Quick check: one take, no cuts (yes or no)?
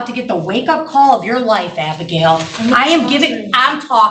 yes